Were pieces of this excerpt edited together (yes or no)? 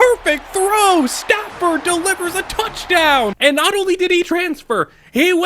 yes